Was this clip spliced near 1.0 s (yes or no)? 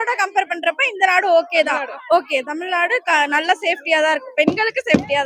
no